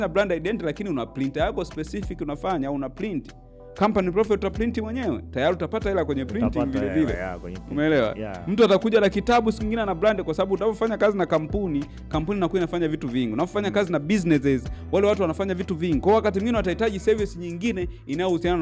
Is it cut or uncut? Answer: uncut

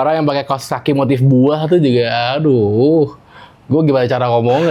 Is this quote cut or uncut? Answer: uncut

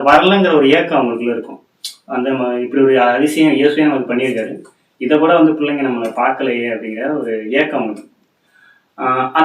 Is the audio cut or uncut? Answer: uncut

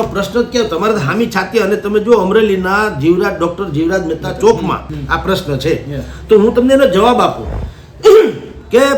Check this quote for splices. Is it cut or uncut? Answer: cut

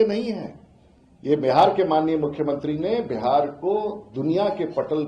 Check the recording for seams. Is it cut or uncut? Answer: uncut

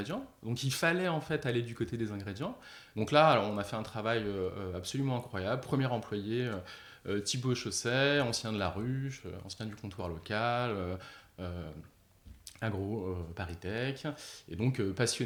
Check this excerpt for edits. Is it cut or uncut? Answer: uncut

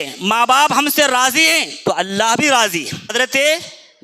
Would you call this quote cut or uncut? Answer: cut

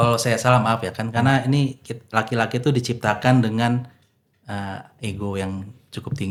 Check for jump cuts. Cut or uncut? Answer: uncut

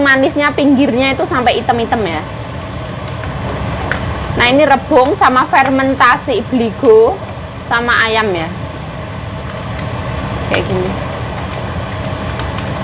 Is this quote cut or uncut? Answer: uncut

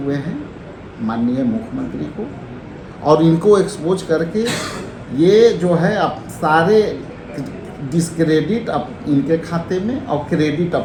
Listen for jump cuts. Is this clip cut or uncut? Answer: uncut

